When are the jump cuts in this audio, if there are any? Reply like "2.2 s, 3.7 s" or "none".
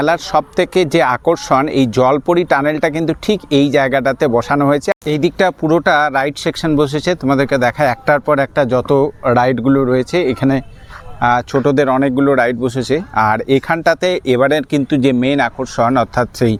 none